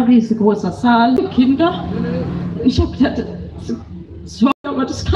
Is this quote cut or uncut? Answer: cut